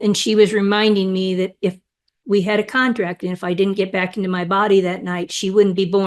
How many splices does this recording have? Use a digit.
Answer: 0